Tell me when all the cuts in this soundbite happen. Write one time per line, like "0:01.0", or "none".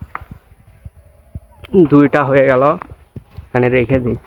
none